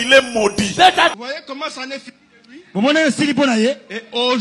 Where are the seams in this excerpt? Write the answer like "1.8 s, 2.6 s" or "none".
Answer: 1.2 s

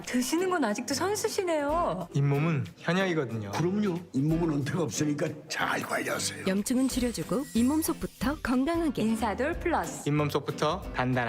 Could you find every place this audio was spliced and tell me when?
none

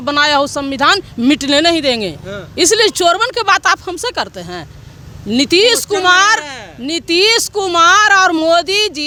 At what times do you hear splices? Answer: none

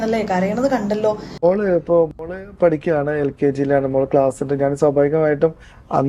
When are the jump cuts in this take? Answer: 1.4 s

